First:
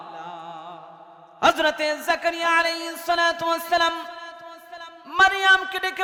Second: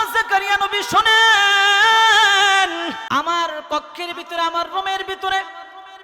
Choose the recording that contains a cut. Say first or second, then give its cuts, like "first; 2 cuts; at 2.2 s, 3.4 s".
second; 1 cut; at 3.0 s